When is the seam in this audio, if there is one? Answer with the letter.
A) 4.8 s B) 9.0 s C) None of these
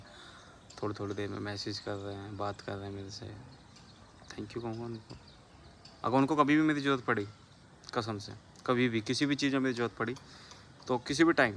C